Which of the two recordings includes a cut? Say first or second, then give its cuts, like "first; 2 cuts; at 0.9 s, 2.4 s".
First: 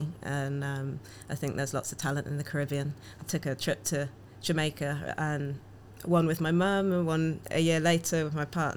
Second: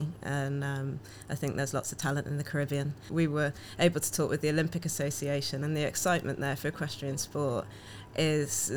second; 1 cut; at 3.1 s